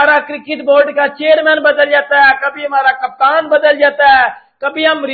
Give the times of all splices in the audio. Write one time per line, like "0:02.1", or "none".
none